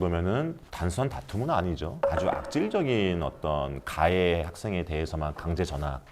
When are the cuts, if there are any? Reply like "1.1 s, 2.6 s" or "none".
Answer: 2.1 s